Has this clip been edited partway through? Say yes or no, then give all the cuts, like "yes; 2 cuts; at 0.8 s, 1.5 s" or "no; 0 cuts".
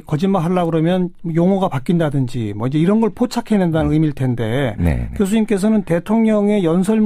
yes; 1 cut; at 5.6 s